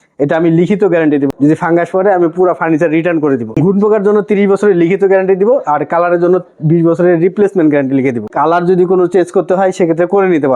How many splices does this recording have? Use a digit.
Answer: 3